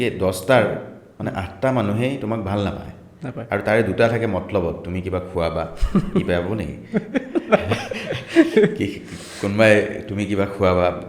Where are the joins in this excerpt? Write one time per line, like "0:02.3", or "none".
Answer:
none

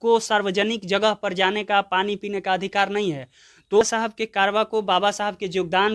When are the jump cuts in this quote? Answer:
0:03.8

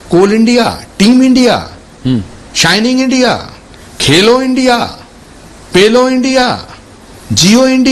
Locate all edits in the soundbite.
none

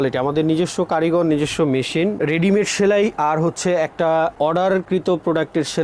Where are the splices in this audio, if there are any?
0:02.2
0:04.6

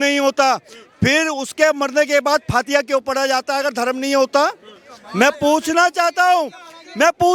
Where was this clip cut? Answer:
none

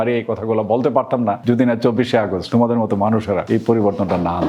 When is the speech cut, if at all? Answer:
0:01.4
0:02.4
0:03.4

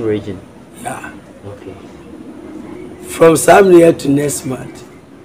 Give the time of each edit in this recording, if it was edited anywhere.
0:02.8

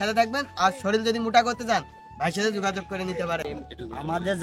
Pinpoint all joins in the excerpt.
0:03.5

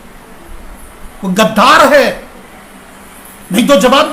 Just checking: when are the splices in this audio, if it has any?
none

